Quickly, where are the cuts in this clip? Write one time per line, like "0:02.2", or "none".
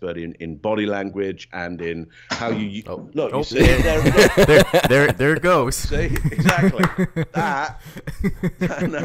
none